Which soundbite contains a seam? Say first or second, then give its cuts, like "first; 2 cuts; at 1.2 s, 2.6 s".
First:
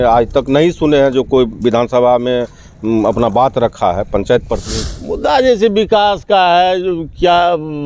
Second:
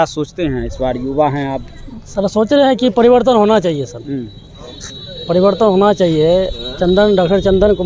first; 1 cut; at 4.6 s